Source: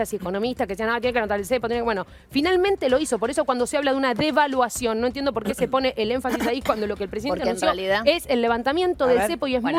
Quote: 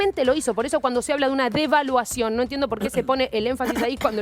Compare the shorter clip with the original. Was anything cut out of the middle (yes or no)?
no